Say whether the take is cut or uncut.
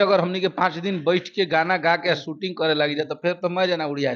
uncut